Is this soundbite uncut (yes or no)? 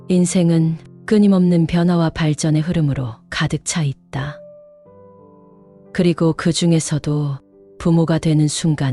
yes